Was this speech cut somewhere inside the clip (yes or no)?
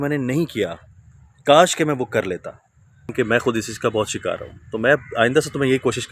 yes